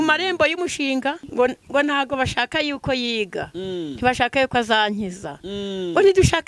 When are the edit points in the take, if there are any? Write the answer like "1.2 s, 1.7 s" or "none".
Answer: 1.2 s